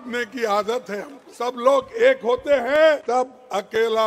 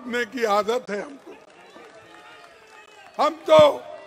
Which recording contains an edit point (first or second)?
first